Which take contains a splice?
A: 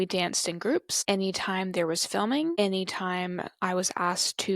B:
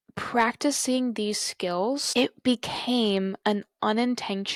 A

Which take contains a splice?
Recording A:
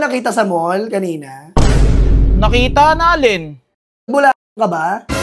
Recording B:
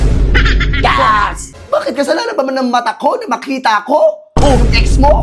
B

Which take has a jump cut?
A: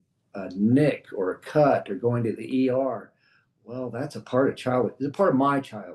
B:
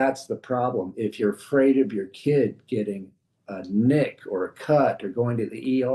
B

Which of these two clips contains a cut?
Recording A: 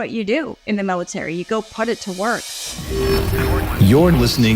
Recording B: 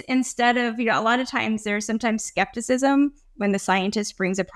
A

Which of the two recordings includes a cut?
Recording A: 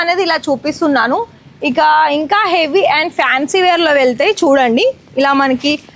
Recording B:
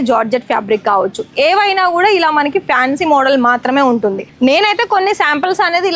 B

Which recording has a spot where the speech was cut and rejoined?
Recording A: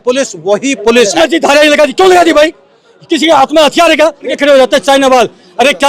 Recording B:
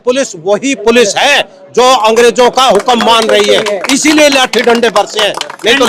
A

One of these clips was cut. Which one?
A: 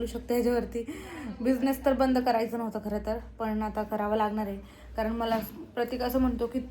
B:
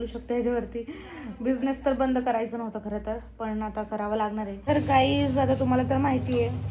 B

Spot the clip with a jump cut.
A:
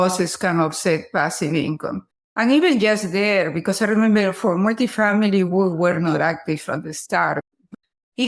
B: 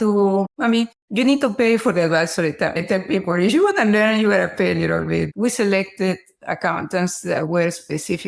B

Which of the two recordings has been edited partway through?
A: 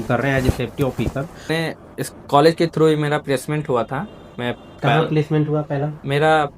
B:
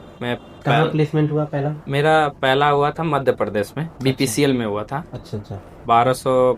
A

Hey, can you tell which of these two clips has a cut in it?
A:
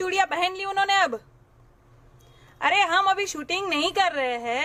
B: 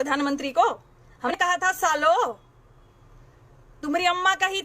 B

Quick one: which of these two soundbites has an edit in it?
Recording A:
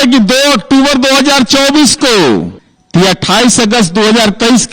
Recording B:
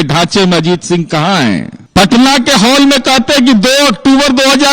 B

